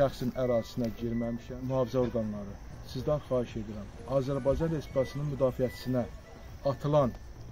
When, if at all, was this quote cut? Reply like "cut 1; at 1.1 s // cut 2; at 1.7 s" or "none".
cut 1; at 1.5 s

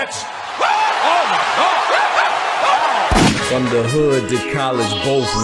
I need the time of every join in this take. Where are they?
cut 1; at 3.3 s

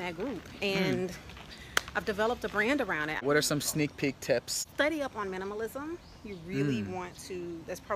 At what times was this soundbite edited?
cut 1; at 3.2 s // cut 2; at 4.6 s

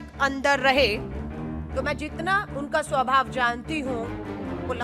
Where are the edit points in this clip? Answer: none

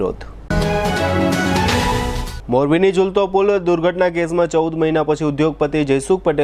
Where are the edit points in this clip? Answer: none

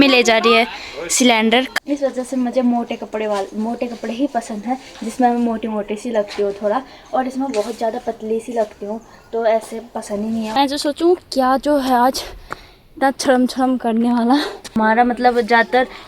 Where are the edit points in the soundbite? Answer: cut 1; at 1.7 s // cut 2; at 10.5 s // cut 3; at 14.7 s

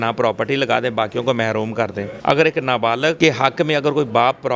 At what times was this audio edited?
cut 1; at 2.1 s // cut 2; at 3.2 s

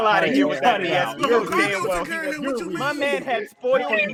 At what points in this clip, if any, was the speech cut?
none

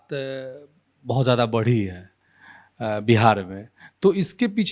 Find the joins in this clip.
none

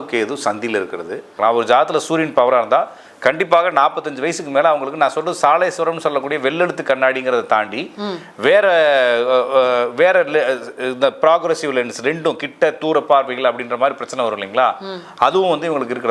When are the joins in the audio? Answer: cut 1; at 1.4 s

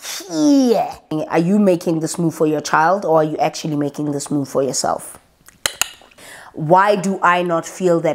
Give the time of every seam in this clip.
cut 1; at 1.1 s // cut 2; at 6.1 s

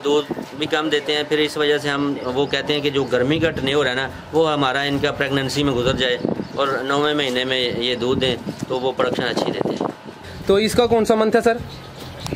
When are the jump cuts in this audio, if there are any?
cut 1; at 10.3 s

